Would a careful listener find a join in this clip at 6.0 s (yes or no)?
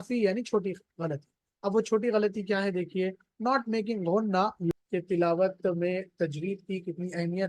no